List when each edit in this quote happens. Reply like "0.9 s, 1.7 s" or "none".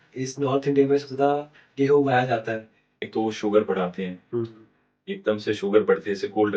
3.1 s